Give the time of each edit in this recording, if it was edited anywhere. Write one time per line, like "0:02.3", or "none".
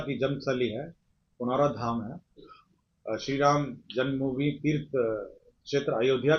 none